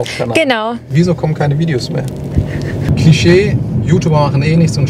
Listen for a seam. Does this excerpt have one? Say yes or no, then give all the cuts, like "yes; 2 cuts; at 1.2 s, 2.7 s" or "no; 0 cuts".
yes; 1 cut; at 2.9 s